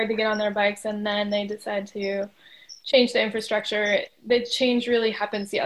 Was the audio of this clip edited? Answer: no; 0 cuts

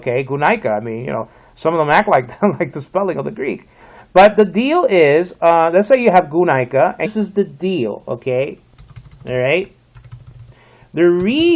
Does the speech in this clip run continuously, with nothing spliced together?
yes; 0 cuts

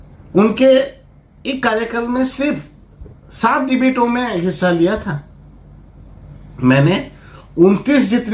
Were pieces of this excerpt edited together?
no; 0 cuts

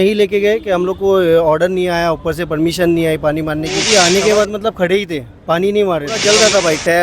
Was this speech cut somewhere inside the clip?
yes; 2 cuts; at 3.9 s, 6.2 s

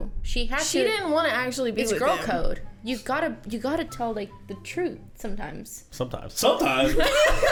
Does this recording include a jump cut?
no; 0 cuts

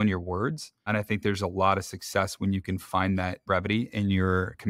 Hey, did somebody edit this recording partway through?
no; 0 cuts

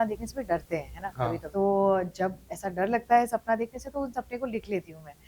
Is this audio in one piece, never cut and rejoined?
yes; 0 cuts

